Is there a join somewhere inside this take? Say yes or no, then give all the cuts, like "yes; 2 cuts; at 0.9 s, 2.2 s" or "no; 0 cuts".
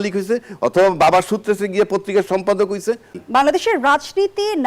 yes; 1 cut; at 3.2 s